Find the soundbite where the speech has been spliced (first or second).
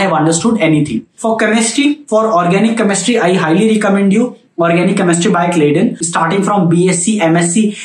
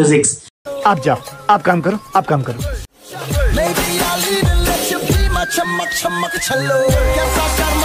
first